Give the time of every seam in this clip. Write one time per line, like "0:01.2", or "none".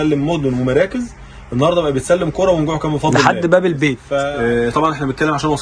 0:04.1